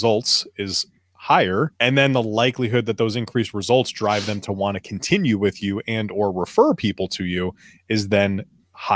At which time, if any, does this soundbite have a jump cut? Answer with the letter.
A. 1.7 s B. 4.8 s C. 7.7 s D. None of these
A